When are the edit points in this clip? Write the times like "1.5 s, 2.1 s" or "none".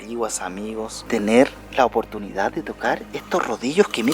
1.0 s